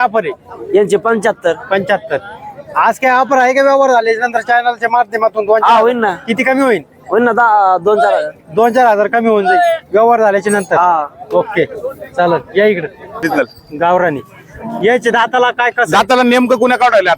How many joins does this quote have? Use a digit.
1